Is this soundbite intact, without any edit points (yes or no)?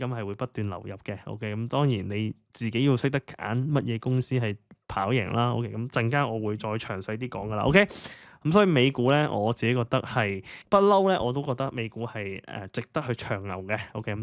yes